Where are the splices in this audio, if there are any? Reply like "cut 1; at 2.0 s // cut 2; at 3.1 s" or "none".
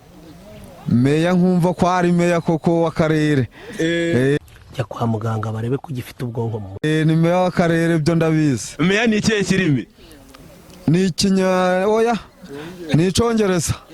none